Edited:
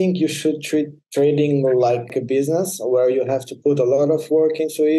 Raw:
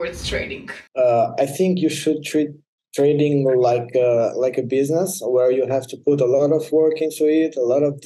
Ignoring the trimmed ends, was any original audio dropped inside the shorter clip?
yes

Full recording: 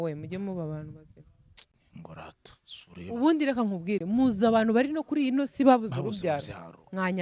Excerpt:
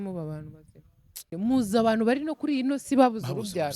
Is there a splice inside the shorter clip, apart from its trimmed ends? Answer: yes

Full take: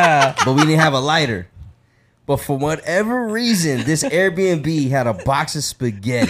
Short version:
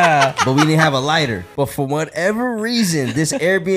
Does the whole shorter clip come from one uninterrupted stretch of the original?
no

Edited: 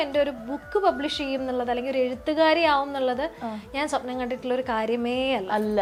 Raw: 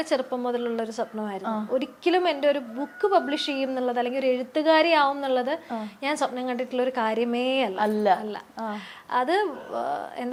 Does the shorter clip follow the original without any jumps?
yes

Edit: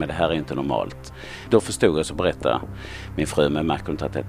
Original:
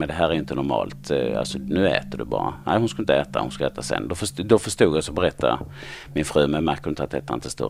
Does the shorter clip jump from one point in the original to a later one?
yes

